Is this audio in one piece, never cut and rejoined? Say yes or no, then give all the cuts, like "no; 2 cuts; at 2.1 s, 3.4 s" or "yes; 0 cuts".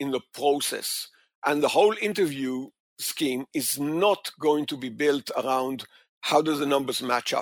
yes; 0 cuts